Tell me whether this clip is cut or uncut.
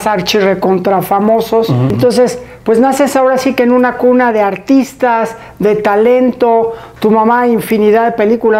uncut